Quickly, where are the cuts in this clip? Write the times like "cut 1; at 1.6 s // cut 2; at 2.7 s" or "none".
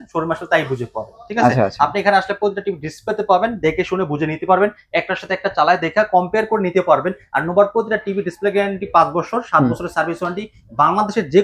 none